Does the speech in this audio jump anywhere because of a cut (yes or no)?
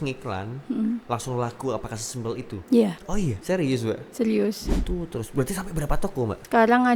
yes